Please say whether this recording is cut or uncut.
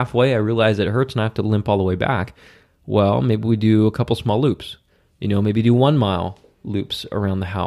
uncut